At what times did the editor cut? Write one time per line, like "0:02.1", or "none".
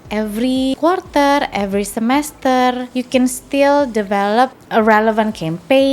0:00.7
0:02.9
0:04.6